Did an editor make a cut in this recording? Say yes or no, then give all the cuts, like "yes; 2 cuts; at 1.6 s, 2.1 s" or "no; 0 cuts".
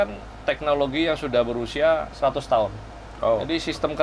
yes; 1 cut; at 2.1 s